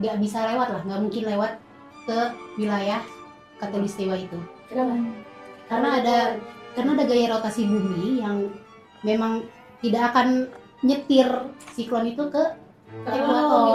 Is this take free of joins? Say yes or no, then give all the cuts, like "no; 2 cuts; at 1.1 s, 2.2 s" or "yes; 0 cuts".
yes; 0 cuts